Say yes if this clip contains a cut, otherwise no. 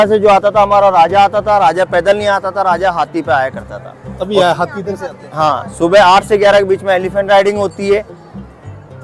no